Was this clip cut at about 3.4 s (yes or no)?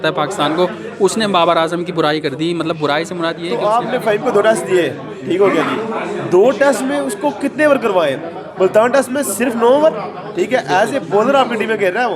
yes